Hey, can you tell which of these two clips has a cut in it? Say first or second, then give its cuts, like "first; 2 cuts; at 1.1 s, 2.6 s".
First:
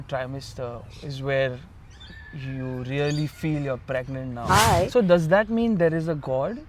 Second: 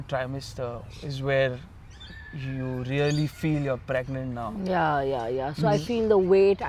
first; 1 cut; at 4.5 s